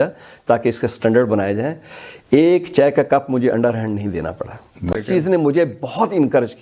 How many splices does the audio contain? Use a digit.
1